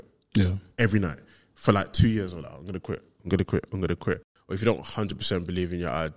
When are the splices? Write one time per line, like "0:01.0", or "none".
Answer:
0:04.4